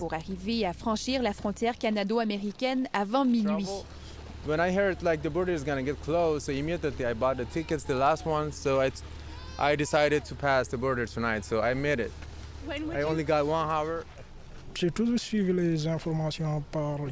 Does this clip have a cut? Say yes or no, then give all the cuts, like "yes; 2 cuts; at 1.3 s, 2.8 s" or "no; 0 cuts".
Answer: no; 0 cuts